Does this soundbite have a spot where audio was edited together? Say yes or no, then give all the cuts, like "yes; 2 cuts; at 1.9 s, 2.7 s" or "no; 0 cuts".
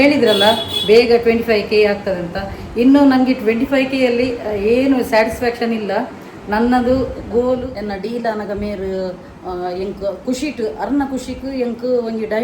yes; 1 cut; at 7.7 s